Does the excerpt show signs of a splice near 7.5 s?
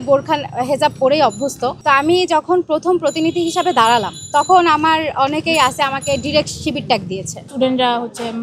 yes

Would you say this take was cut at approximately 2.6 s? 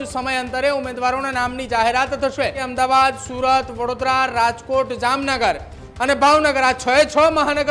yes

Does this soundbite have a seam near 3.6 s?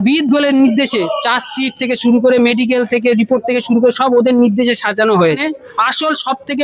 no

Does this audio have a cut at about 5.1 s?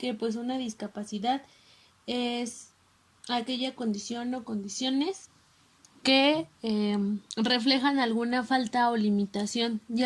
no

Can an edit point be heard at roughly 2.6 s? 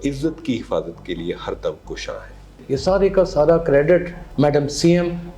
yes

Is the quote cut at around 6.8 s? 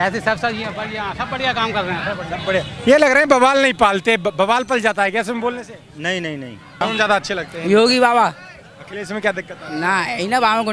yes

